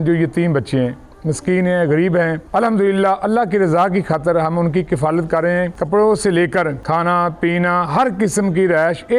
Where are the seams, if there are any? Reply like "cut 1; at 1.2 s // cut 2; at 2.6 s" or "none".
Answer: none